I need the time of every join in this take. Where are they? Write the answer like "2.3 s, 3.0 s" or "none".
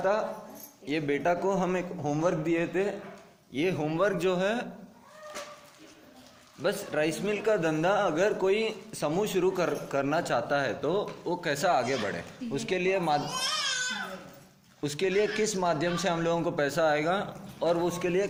none